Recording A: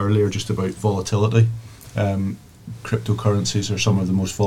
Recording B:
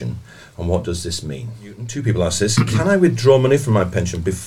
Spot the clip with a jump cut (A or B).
B